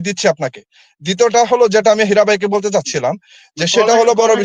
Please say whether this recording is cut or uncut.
uncut